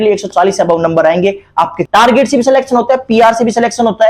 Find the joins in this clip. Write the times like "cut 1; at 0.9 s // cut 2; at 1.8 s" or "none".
cut 1; at 1.8 s